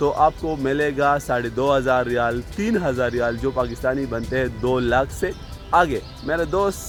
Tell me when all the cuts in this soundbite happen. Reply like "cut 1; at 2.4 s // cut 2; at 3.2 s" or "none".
none